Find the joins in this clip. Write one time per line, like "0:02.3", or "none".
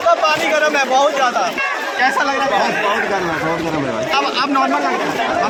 none